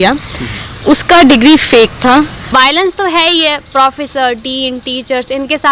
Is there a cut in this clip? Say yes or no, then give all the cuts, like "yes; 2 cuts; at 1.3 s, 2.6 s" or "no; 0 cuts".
yes; 1 cut; at 2.5 s